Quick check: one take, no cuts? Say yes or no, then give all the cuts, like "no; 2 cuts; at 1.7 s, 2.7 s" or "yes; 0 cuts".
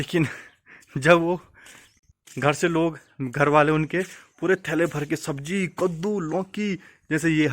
no; 1 cut; at 2.0 s